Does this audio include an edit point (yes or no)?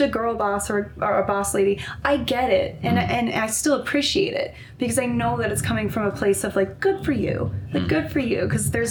no